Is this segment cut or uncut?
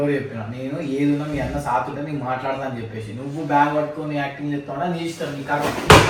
uncut